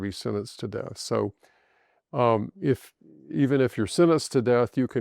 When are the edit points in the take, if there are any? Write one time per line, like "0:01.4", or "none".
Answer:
none